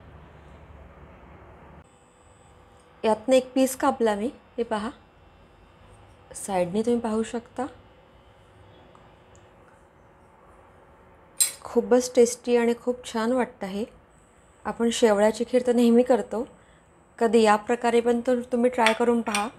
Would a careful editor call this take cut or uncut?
cut